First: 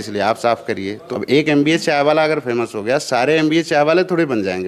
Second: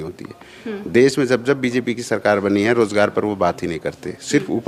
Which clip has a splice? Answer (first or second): first